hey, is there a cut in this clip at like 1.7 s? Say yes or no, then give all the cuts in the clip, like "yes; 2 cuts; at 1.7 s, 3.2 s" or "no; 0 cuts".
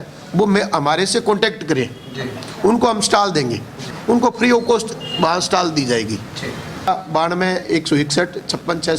no; 2 cuts; at 3.9 s, 6.9 s